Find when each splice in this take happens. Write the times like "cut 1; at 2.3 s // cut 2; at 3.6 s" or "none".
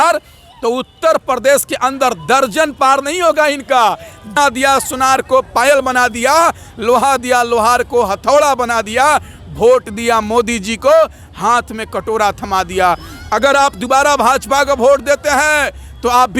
cut 1; at 4.3 s